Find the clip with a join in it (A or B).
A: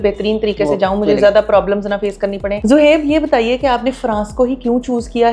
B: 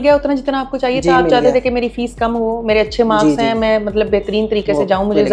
A